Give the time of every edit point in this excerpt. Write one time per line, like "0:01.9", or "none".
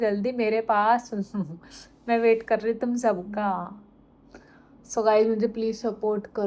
none